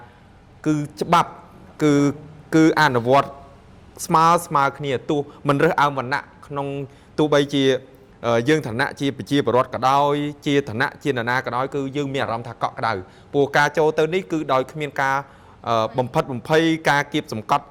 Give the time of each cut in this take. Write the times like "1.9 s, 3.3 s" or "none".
none